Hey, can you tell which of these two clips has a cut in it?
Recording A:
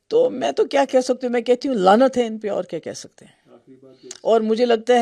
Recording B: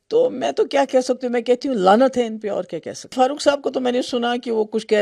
B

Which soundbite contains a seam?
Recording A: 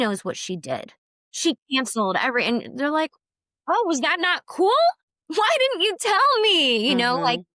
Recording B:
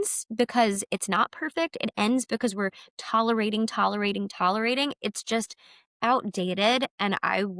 A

